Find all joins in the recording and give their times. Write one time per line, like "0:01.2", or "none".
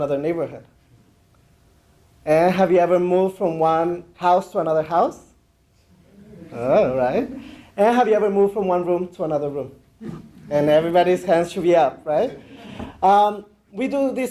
0:05.2